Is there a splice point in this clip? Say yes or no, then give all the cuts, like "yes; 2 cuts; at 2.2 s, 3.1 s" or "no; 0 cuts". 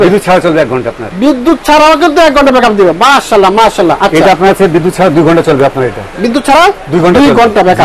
no; 0 cuts